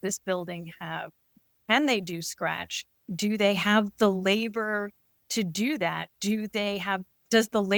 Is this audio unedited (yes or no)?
yes